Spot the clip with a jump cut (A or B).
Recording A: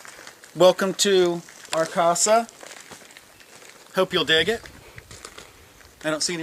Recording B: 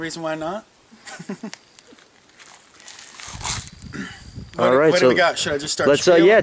B